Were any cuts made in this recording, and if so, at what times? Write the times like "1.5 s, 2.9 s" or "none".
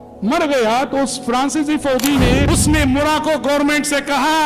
2.4 s